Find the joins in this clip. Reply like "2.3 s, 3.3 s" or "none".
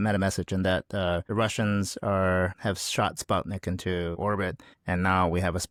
none